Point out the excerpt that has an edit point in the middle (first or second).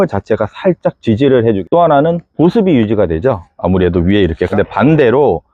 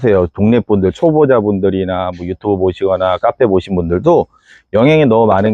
first